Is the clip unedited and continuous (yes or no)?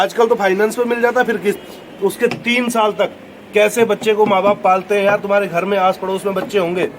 no